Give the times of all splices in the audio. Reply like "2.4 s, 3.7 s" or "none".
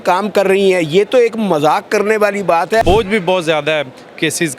2.8 s